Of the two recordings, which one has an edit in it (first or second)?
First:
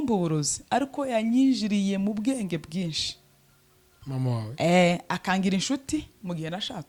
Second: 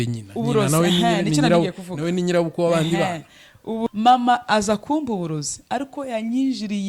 second